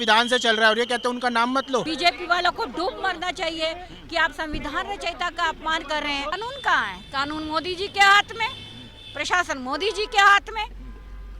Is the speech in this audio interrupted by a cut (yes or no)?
yes